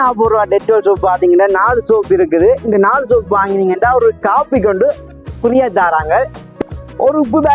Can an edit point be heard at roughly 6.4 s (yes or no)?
yes